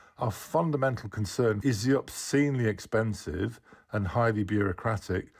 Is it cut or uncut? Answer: cut